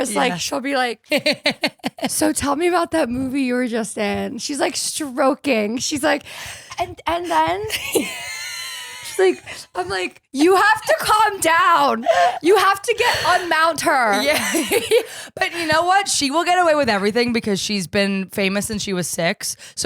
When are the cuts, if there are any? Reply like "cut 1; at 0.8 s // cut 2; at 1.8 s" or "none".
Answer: cut 1; at 1.0 s